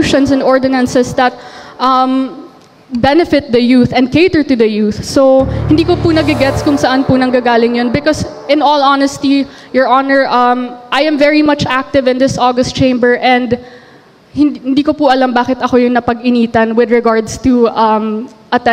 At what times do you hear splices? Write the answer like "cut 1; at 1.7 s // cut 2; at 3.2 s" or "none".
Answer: none